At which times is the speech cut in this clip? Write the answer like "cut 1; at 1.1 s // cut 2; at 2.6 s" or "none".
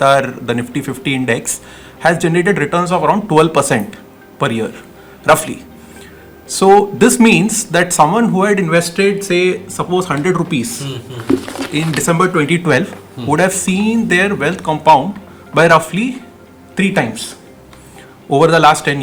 none